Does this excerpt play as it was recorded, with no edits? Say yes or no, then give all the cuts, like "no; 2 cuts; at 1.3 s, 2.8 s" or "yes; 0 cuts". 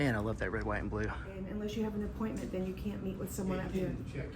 no; 1 cut; at 1.5 s